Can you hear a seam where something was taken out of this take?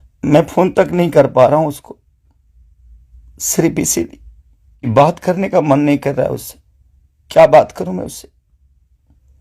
yes; 1 cut; at 4.9 s

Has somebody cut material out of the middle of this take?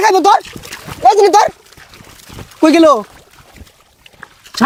no; 0 cuts

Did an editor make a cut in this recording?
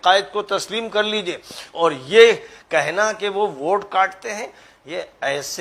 no; 0 cuts

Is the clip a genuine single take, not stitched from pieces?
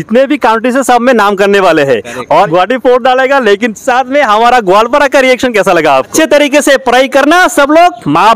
no; 2 cuts; at 2.5 s, 6.1 s

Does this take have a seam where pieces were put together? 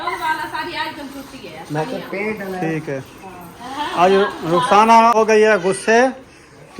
yes; 1 cut; at 5.1 s

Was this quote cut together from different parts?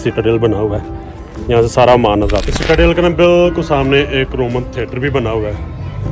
yes; 1 cut; at 2.4 s

